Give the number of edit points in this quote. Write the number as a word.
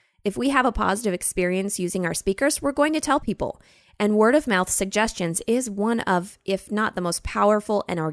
zero